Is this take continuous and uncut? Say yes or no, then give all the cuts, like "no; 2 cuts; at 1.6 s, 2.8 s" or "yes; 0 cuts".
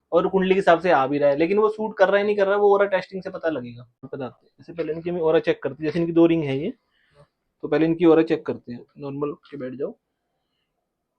no; 1 cut; at 4.0 s